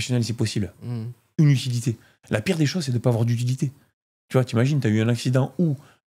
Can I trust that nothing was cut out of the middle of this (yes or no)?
yes